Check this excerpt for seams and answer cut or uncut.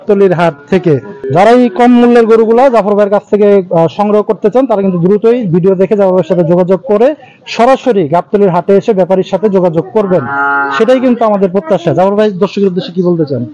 uncut